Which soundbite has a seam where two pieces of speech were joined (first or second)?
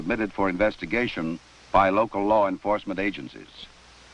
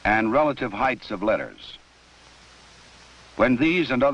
second